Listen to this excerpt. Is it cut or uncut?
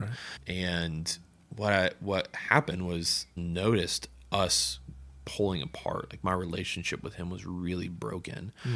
cut